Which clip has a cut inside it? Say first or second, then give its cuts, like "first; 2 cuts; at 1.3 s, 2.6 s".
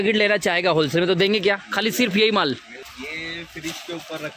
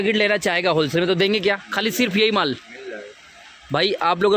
first; 1 cut; at 2.9 s